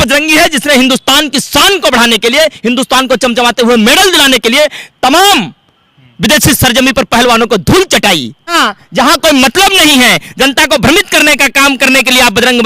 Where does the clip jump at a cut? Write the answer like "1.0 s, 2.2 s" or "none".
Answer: 8.5 s